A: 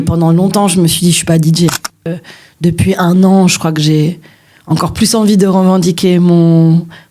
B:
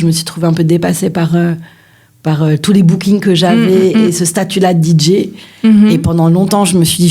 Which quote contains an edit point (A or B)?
A